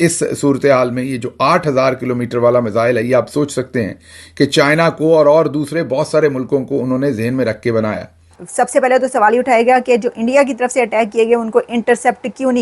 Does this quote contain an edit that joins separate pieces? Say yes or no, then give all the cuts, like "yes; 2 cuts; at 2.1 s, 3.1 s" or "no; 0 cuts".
yes; 1 cut; at 8.2 s